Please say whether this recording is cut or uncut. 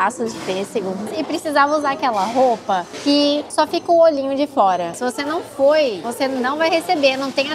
cut